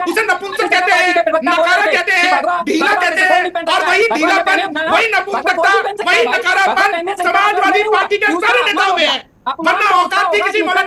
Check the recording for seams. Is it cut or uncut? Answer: uncut